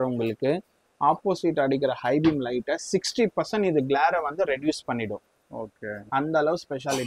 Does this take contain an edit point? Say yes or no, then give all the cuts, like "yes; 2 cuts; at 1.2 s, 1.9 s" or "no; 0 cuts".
no; 0 cuts